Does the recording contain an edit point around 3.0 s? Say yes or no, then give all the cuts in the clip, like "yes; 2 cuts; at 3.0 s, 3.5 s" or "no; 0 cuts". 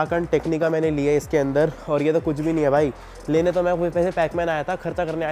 no; 0 cuts